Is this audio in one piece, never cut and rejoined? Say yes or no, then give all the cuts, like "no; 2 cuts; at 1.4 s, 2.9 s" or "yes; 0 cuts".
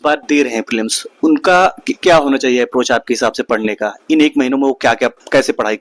yes; 0 cuts